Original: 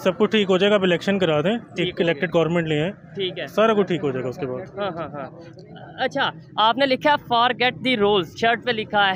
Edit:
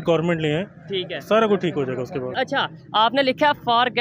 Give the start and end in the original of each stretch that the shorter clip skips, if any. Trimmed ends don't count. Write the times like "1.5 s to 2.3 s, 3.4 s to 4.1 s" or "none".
4.6 s to 5.9 s